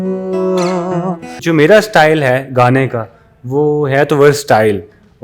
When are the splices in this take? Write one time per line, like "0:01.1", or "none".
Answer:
0:01.4